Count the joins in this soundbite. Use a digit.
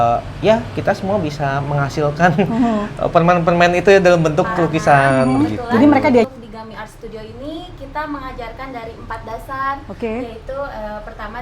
1